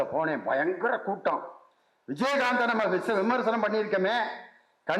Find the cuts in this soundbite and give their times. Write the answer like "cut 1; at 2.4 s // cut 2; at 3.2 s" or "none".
none